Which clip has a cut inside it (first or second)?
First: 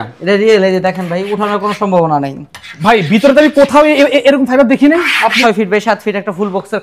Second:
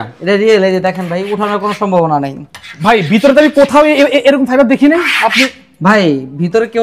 first